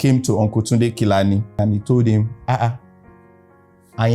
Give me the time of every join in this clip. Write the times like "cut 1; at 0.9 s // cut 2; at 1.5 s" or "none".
cut 1; at 1.6 s